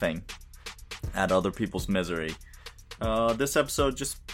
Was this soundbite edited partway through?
no; 0 cuts

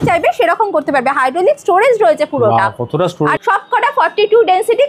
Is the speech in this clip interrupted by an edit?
yes; 1 cut; at 3.4 s

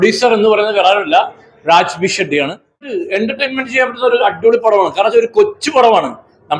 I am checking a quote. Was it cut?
yes; 1 cut; at 3.0 s

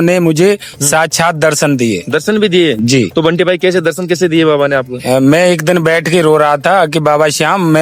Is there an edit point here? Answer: no; 0 cuts

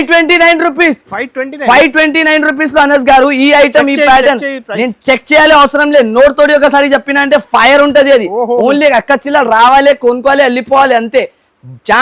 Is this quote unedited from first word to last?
yes; 0 cuts

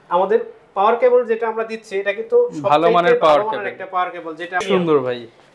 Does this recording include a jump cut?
yes; 1 cut; at 4.6 s

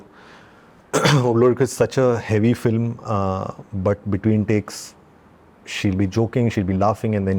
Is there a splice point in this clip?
no; 0 cuts

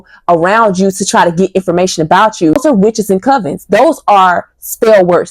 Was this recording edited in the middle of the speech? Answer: yes; 1 cut; at 2.6 s

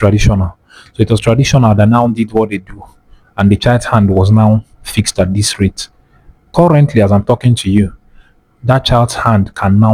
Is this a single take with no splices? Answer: yes; 0 cuts

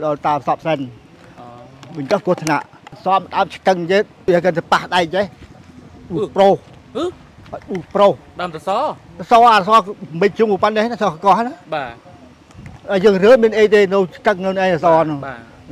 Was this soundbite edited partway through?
yes; 2 cuts; at 3.0 s, 4.3 s

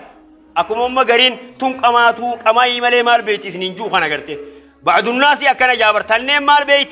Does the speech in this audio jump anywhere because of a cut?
no; 0 cuts

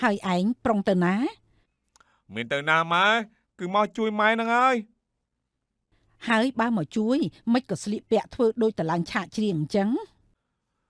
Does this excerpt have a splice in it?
no; 0 cuts

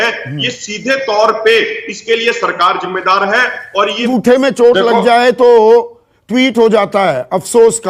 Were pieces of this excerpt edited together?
yes; 1 cut; at 4.0 s

